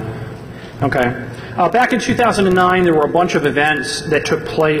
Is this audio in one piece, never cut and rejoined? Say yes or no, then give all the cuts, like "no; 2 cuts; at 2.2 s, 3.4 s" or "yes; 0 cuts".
yes; 0 cuts